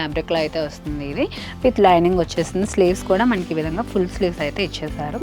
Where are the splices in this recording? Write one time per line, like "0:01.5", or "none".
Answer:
none